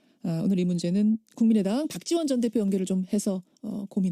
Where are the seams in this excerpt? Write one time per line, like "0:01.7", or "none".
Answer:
none